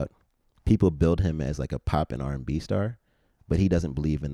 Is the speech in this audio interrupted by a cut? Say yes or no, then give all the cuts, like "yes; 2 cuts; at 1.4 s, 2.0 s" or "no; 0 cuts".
no; 0 cuts